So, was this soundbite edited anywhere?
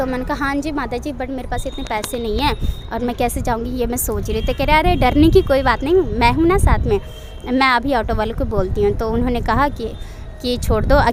no; 0 cuts

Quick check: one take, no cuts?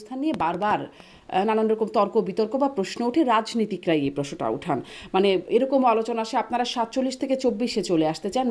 yes; 0 cuts

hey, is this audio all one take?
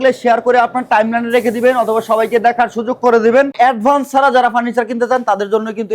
no; 1 cut; at 3.5 s

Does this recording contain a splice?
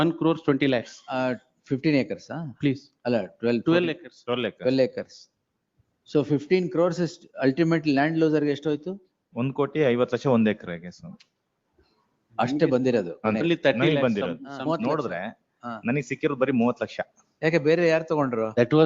yes; 1 cut; at 14.8 s

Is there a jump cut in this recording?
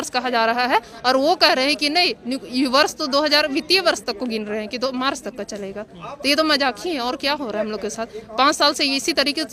no; 0 cuts

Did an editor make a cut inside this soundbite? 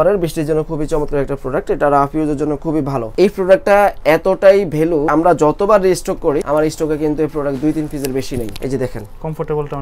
yes; 4 cuts; at 3.1 s, 5.1 s, 6.4 s, 8.5 s

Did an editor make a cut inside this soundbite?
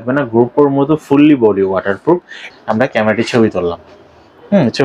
yes; 1 cut; at 2.5 s

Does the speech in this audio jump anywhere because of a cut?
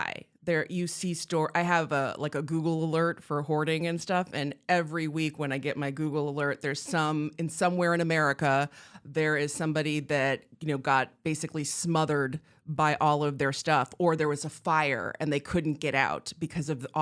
no; 0 cuts

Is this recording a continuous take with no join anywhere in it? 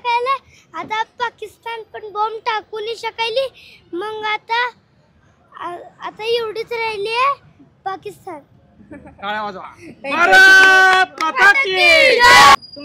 yes; 0 cuts

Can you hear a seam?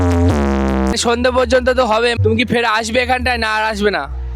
yes; 2 cuts; at 0.9 s, 2.2 s

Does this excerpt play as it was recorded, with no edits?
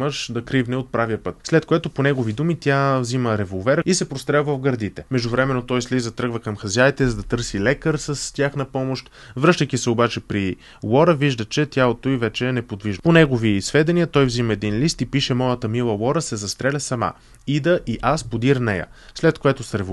no; 4 cuts; at 1.3 s, 3.8 s, 5.0 s, 12.8 s

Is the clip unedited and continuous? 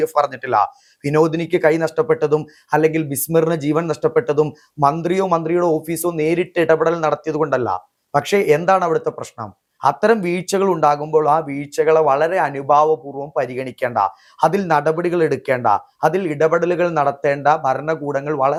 yes; 0 cuts

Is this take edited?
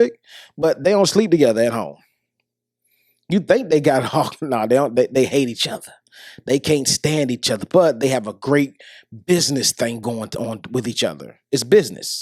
no; 0 cuts

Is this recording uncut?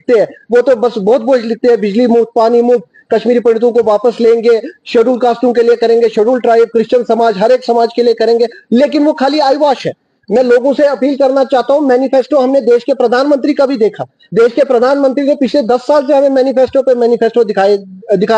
yes; 0 cuts

